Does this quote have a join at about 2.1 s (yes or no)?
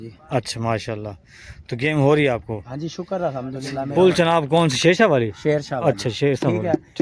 no